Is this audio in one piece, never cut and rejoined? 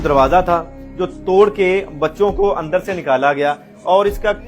yes; 0 cuts

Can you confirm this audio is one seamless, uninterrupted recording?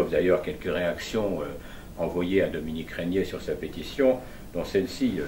no; 1 cut; at 1.0 s

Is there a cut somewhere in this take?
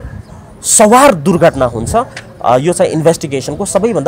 no; 0 cuts

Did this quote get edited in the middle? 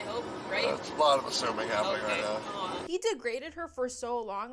yes; 1 cut; at 2.8 s

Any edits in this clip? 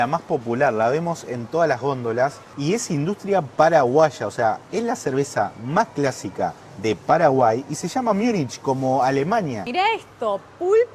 yes; 1 cut; at 9.6 s

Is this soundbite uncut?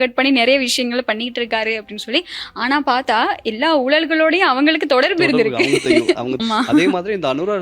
no; 1 cut; at 6.3 s

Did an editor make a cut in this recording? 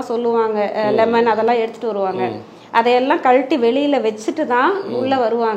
no; 0 cuts

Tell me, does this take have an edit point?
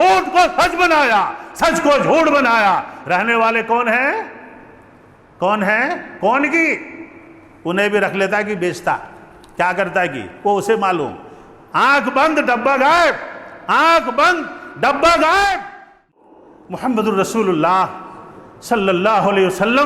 yes; 1 cut; at 16.1 s

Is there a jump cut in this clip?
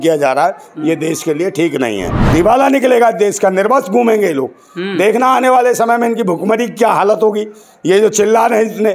yes; 1 cut; at 2.1 s

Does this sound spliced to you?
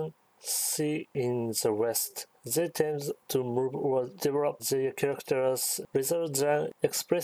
yes; 4 cuts; at 1.1 s, 2.1 s, 3.2 s, 4.3 s

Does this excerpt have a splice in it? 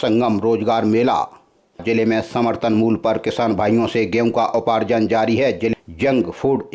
yes; 2 cuts; at 1.8 s, 5.7 s

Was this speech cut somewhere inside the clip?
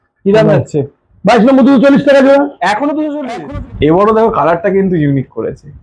yes; 1 cut; at 3.2 s

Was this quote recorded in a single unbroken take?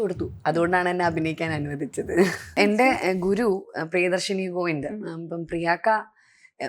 no; 1 cut; at 2.6 s

